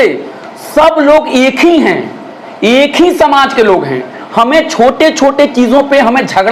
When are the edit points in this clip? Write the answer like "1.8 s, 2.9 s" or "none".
none